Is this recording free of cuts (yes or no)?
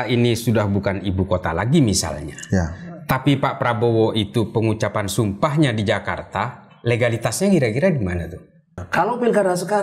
no